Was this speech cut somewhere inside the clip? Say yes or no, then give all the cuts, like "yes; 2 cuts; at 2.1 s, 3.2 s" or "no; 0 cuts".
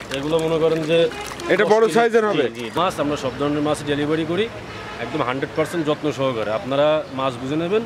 yes; 1 cut; at 2.7 s